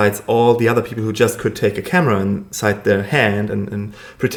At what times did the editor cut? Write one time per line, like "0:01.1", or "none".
none